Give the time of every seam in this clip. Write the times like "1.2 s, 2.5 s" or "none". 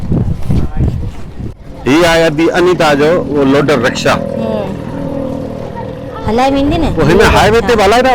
1.6 s